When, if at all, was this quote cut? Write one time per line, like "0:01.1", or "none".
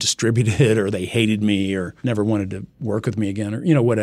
0:01.9